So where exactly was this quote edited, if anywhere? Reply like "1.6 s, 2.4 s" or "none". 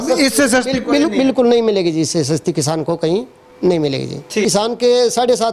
4.4 s